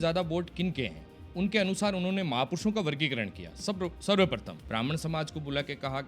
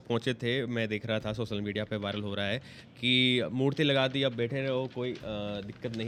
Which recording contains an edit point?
first; 1 cut; at 4.5 s

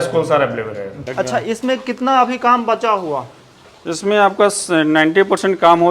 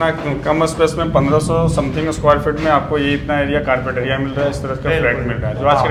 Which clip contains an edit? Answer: first; 1 cut; at 1.0 s

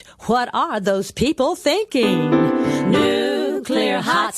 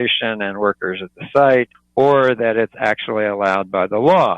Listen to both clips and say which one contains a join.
second; 1 cut; at 1.8 s

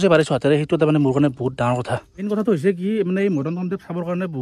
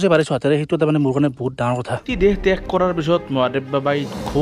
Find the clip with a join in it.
second; 1 cut; at 2.1 s

